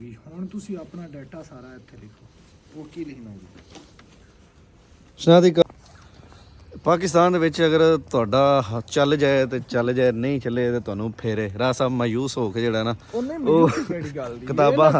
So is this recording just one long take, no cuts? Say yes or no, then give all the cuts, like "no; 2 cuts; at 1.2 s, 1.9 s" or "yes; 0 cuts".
no; 1 cut; at 5.6 s